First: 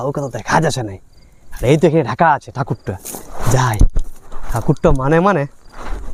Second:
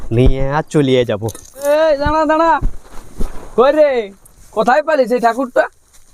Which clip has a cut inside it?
second; 1 cut; at 1.6 s

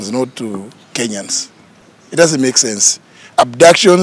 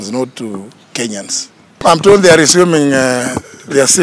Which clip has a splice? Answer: second; 1 cut; at 1.8 s

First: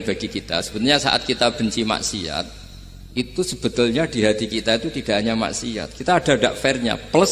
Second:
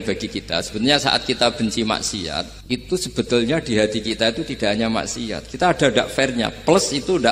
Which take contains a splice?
second; 1 cut; at 2.5 s

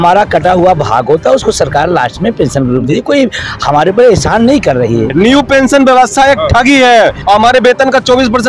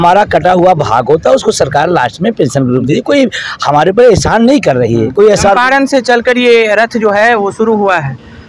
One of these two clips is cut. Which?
first; 2 cuts; at 5.1 s, 7.2 s

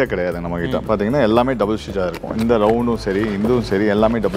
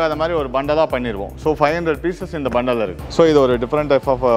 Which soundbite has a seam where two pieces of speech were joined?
second; 1 cut; at 3.0 s

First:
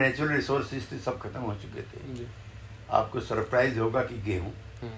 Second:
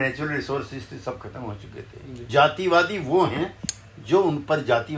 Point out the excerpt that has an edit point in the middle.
second; 1 cut; at 2.3 s

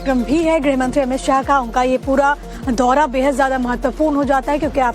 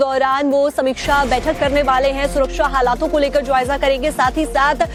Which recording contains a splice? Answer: first; 1 cut; at 2.7 s

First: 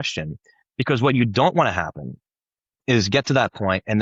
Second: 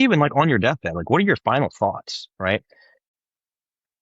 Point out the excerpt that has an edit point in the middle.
second; 1 cut; at 3.1 s

